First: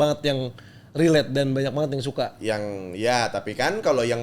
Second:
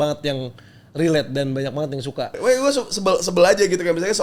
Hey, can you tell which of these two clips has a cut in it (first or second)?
second